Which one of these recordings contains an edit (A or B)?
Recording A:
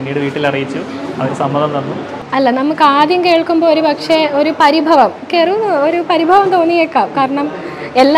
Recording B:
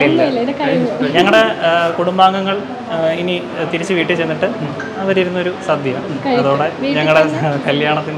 A